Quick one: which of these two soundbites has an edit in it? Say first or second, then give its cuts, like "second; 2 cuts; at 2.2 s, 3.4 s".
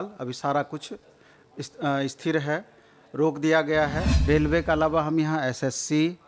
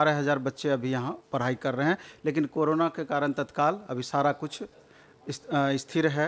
first; 1 cut; at 4.1 s